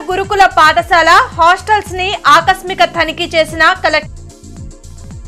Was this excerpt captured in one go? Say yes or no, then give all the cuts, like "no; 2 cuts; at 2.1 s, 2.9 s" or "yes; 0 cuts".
yes; 0 cuts